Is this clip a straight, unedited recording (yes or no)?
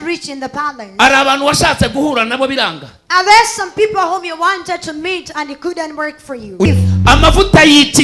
no